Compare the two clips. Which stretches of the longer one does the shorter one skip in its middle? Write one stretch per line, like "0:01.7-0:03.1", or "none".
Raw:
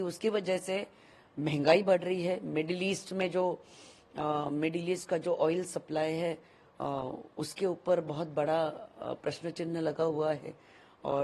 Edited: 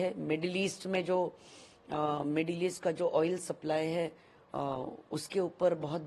none

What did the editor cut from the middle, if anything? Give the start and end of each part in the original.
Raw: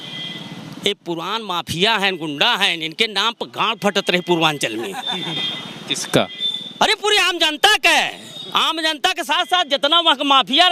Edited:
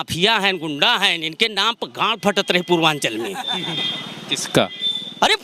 none

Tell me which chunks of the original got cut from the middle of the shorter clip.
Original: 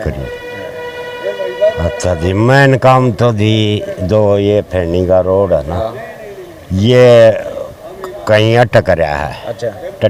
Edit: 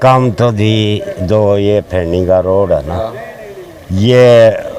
none

